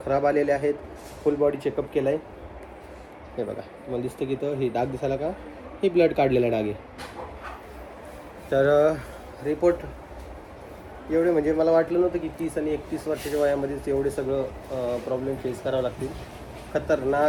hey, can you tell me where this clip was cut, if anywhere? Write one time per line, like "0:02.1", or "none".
none